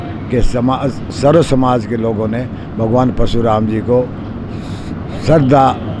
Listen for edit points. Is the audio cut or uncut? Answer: uncut